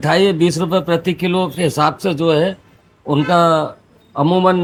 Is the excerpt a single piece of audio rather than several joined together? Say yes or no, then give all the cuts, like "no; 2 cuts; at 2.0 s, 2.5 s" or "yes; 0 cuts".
yes; 0 cuts